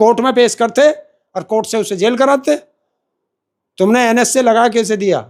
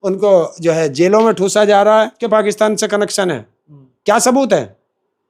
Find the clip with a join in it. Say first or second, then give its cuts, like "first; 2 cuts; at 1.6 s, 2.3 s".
second; 1 cut; at 2.2 s